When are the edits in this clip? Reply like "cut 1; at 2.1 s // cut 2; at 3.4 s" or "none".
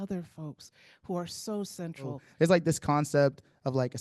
cut 1; at 2.2 s